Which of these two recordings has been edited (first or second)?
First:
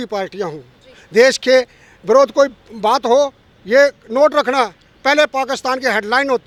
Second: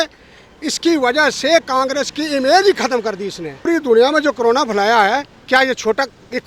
second